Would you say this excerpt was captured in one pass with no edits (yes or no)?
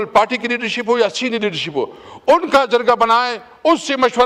yes